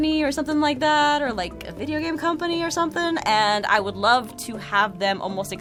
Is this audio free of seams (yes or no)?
yes